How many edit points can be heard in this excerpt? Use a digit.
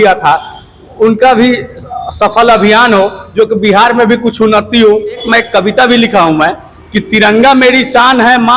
1